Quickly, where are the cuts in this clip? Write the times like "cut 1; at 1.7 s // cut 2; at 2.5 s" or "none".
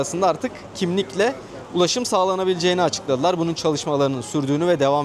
none